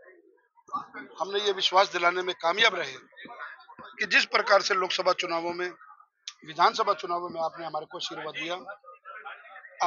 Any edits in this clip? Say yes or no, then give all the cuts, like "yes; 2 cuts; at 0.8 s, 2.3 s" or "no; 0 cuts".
no; 0 cuts